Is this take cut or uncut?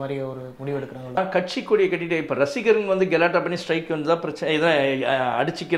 cut